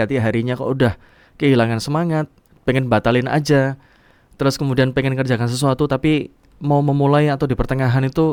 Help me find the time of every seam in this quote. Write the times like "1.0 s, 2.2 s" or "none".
none